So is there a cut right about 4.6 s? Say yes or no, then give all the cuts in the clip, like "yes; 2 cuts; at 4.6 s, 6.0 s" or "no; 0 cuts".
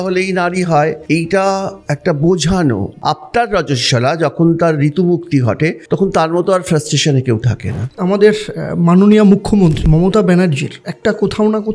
no; 6 cuts; at 1.0 s, 1.8 s, 2.9 s, 5.8 s, 8.0 s, 9.8 s